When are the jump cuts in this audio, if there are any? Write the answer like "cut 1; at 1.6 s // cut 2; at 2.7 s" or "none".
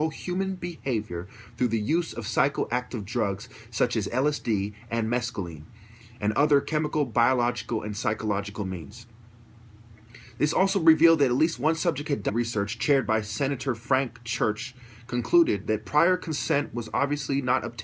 none